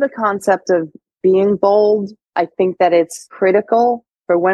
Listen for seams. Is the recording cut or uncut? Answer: cut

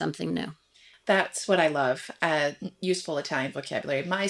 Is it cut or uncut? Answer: uncut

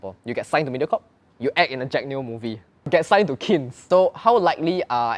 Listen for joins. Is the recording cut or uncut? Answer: cut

